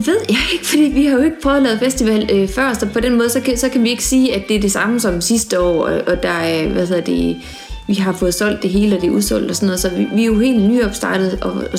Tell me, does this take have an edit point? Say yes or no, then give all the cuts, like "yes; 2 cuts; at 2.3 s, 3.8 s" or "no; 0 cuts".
no; 0 cuts